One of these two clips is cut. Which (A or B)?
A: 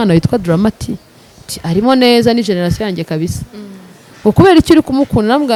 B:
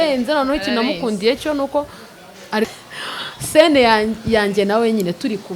B